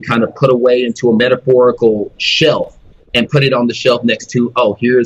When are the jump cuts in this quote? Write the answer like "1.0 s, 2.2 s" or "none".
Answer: none